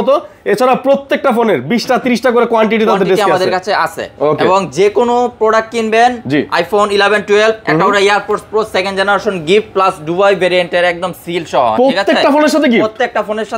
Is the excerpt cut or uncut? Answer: uncut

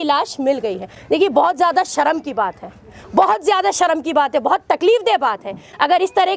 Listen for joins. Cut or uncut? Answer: uncut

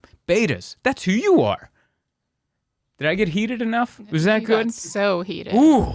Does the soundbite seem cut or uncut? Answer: uncut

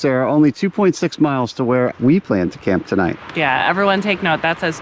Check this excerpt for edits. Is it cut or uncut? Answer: cut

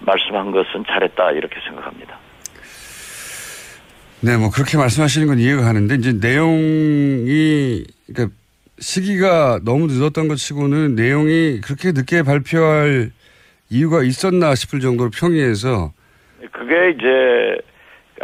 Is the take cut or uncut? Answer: uncut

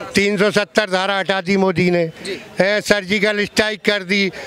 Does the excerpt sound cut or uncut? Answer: uncut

